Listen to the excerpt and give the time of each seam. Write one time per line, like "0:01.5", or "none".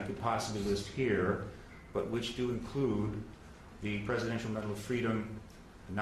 none

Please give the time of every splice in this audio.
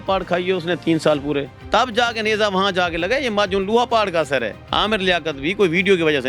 0:04.6

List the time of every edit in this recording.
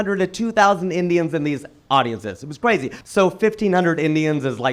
0:02.9

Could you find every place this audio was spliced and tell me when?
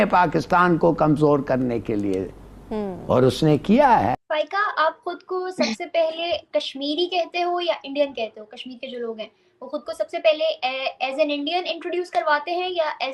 0:04.2

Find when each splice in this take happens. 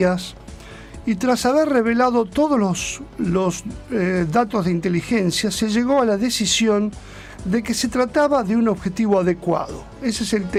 none

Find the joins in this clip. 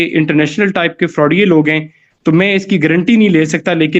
none

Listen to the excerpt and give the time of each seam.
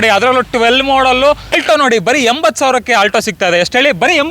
0:01.6

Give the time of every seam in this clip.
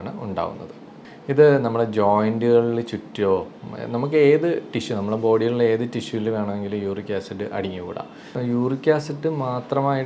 0:00.9
0:08.3

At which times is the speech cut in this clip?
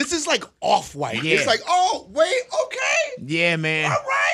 none

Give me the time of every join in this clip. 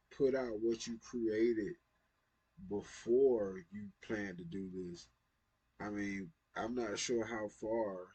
none

